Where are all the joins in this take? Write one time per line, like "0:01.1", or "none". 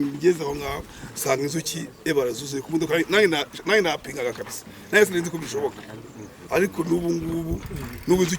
none